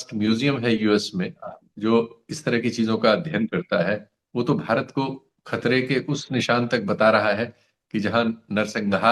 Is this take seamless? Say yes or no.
yes